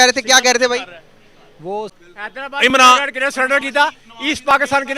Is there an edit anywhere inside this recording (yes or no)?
yes